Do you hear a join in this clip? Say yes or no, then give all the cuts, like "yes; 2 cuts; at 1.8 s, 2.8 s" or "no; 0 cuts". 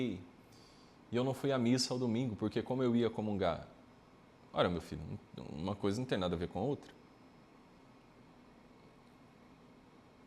no; 0 cuts